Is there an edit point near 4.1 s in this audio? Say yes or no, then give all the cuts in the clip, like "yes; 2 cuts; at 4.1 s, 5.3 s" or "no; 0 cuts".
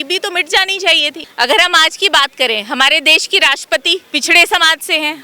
yes; 2 cuts; at 1.2 s, 4.1 s